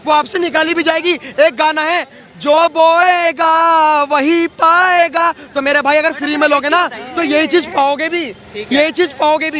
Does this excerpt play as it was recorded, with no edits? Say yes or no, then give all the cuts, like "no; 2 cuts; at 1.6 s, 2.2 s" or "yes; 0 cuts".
yes; 0 cuts